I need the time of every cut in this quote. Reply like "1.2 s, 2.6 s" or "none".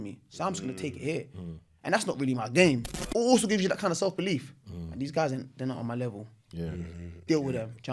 2.9 s